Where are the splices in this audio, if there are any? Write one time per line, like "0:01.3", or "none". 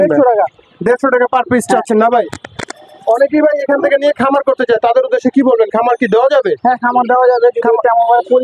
none